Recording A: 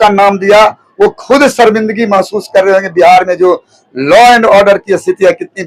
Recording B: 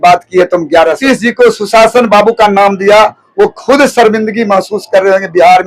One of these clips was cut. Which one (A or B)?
B